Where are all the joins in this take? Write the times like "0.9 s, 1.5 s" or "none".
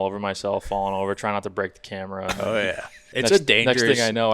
2.9 s